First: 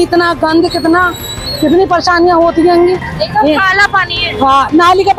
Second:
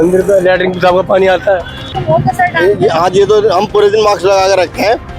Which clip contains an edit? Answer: second; 1 cut; at 1.9 s

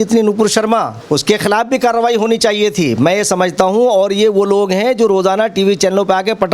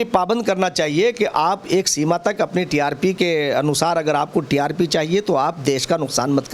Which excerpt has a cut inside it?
first; 1 cut; at 1.0 s

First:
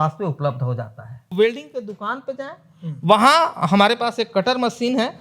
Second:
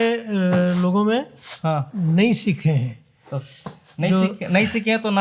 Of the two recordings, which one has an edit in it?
first; 1 cut; at 1.3 s

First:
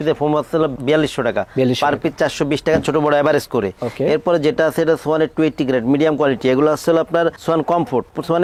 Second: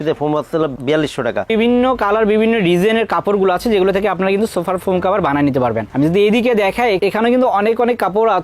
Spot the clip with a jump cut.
second; 1 cut; at 1.5 s

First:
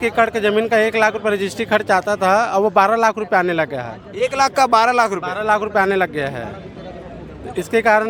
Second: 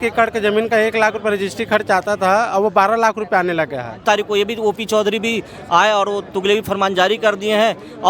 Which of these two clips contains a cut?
second; 1 cut; at 3.9 s

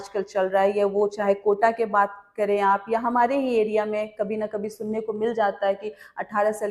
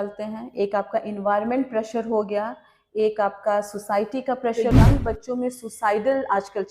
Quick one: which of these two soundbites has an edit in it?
second; 1 cut; at 4.6 s

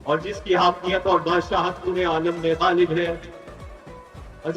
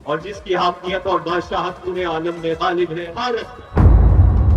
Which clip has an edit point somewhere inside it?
second; 1 cut; at 3.1 s

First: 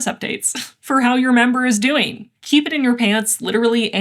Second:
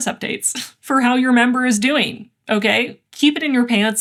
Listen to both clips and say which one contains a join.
first; 1 cut; at 2.3 s

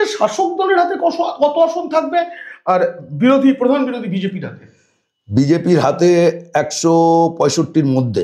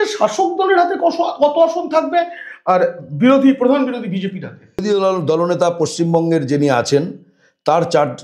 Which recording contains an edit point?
second; 1 cut; at 4.8 s

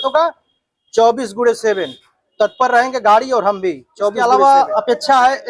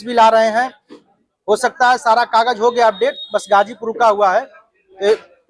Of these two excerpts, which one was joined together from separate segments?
first; 1 cut; at 4.2 s

